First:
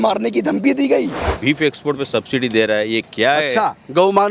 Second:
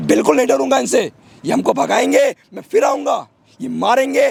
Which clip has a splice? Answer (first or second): first